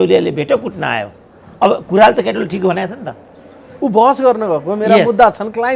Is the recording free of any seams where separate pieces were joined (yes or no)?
yes